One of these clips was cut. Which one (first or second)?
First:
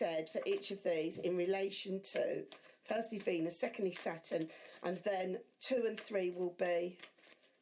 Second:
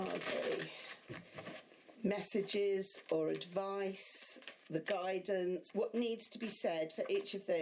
second